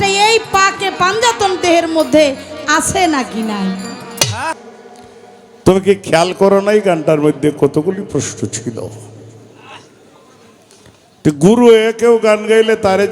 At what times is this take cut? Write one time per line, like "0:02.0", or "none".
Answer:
0:04.6